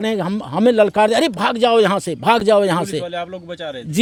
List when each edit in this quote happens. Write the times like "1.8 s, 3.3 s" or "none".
none